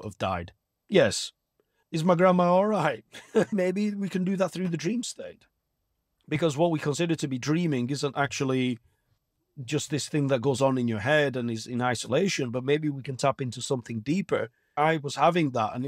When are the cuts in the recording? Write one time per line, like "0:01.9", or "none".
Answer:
0:03.5
0:14.7